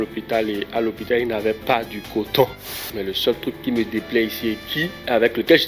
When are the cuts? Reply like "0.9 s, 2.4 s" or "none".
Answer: 2.7 s